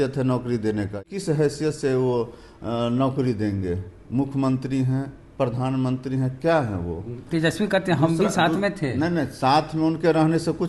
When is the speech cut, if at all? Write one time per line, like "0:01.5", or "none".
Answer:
0:01.0
0:07.1